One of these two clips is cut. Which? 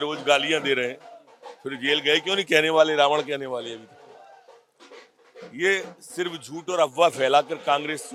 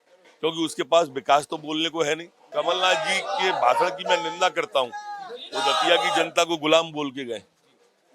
second; 1 cut; at 2.4 s

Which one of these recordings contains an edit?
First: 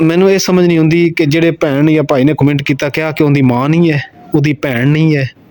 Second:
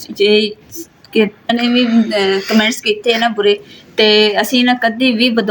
second; 1 cut; at 1.5 s

